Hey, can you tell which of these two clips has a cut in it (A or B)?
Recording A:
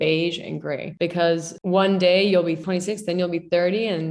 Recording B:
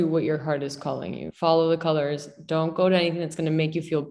A